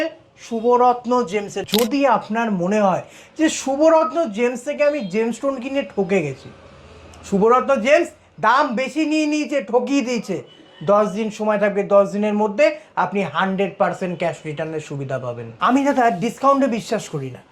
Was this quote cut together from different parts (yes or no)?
yes